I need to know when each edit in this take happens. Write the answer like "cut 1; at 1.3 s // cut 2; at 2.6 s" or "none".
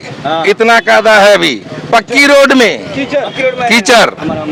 none